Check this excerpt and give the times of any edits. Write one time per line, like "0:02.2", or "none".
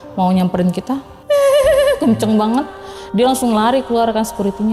none